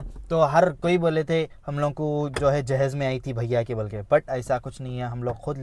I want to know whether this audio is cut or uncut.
uncut